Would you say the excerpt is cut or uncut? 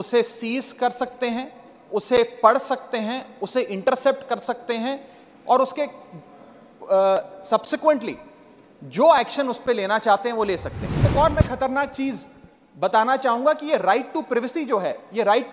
cut